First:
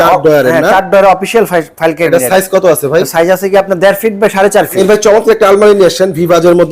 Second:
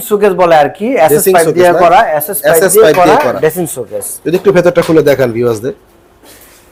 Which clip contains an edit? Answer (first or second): first